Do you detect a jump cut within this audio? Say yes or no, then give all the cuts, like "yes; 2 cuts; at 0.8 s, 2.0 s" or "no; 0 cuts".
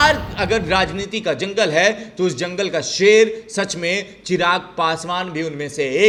no; 0 cuts